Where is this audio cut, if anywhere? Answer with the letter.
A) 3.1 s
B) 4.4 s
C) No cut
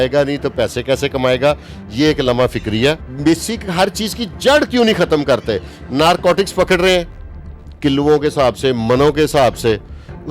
A